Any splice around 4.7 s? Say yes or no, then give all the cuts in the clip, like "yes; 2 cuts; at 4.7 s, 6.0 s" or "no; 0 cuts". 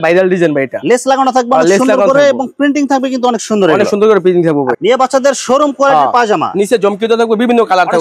yes; 1 cut; at 4.7 s